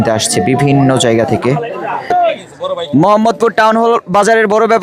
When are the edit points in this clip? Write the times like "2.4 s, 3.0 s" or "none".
2.1 s

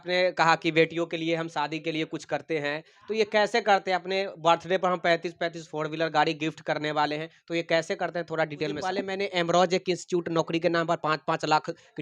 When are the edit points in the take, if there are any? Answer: 8.9 s

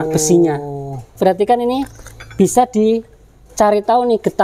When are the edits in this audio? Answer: 1.1 s

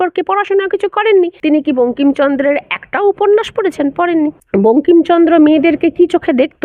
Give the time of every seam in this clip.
1.4 s, 4.4 s

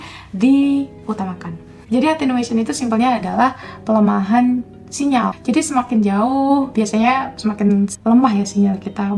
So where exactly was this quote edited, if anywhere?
1.7 s, 5.4 s, 8.0 s

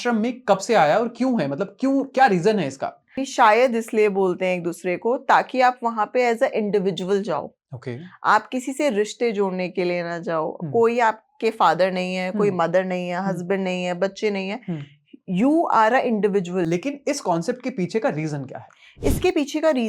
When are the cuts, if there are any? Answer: 3.2 s, 16.7 s

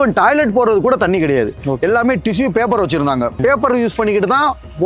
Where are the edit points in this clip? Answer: 3.4 s

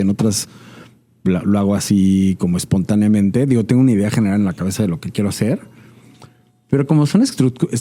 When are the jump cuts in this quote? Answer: none

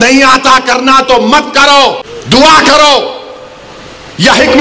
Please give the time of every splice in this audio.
2.1 s

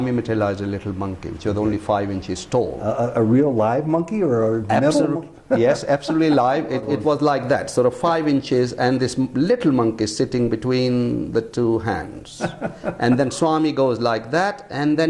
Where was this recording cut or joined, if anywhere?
6.8 s

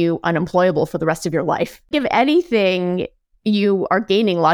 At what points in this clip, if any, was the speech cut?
1.9 s

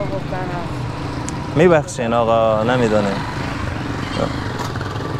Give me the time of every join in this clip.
none

